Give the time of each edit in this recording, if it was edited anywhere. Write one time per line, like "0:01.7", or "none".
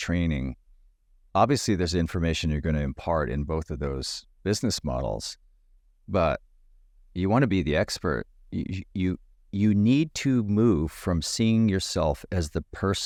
none